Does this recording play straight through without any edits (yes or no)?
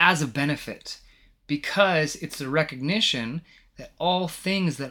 yes